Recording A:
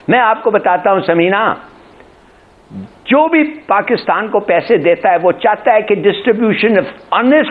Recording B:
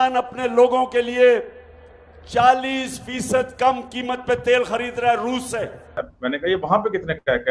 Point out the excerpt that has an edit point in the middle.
B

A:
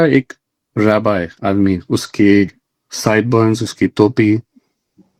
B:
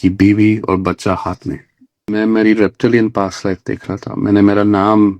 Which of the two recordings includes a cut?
B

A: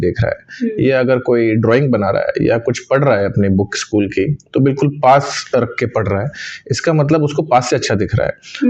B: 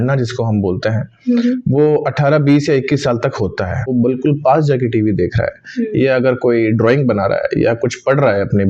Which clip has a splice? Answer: B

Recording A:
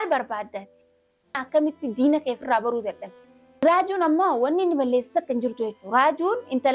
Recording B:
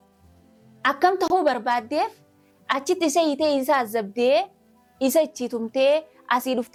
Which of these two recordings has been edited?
A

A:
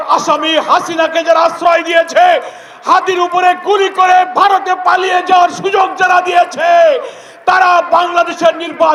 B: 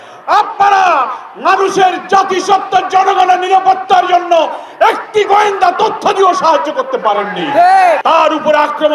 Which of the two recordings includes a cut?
B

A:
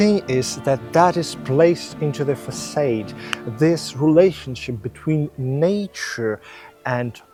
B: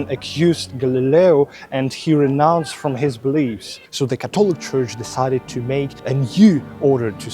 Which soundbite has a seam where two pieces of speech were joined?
B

